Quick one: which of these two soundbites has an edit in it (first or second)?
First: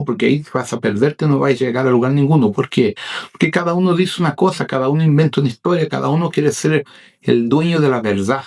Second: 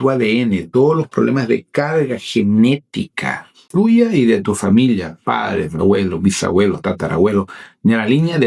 second